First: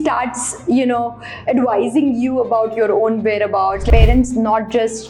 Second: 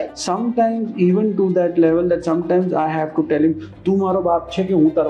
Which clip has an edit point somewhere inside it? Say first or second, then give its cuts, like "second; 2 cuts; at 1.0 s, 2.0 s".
first; 1 cut; at 3.8 s